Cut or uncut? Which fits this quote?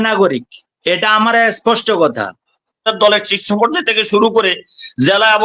cut